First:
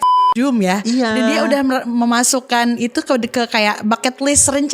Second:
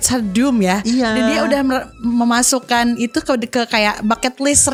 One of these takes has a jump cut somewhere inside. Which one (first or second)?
first